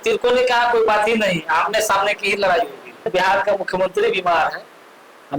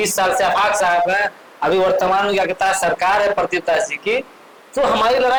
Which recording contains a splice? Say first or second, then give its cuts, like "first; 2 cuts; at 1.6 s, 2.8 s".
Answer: first; 1 cut; at 3.1 s